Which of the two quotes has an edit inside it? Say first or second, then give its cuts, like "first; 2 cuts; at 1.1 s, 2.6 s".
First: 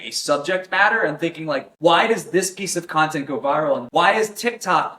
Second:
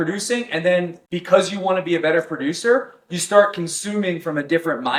first; 1 cut; at 3.8 s